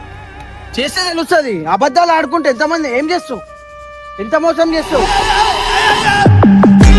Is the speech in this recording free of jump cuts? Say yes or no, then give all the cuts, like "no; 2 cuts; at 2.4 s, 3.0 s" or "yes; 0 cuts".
yes; 0 cuts